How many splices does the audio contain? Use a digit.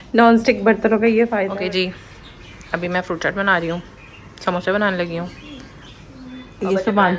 1